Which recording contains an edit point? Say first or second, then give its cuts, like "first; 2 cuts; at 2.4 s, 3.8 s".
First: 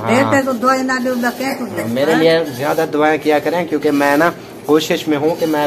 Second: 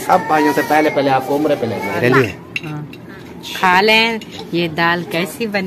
second; 1 cut; at 2.0 s